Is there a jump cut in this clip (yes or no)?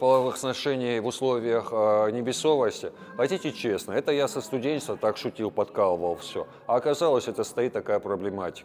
no